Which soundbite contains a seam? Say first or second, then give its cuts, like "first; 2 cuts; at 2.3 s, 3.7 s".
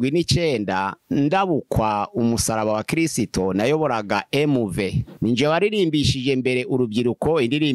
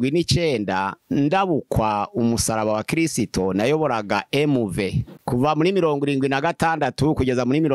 first; 1 cut; at 5.1 s